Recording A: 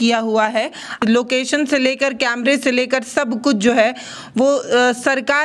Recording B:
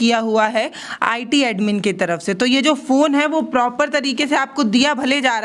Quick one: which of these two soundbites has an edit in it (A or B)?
A